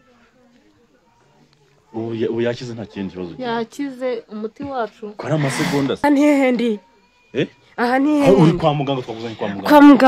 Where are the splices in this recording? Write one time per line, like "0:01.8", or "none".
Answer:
0:06.0